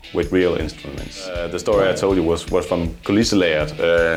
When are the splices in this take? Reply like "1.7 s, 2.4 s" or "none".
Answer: 1.5 s